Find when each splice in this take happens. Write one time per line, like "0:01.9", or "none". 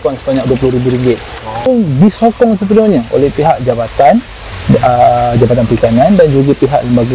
0:01.6